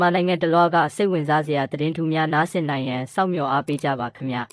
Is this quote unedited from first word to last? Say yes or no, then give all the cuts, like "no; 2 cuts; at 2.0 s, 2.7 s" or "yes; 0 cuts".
yes; 0 cuts